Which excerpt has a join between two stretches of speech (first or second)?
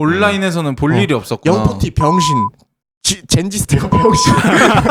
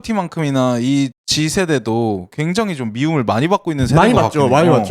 second